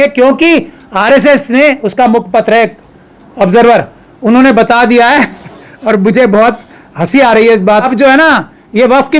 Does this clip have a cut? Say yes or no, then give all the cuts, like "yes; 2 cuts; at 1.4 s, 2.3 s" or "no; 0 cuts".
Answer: yes; 1 cut; at 7.9 s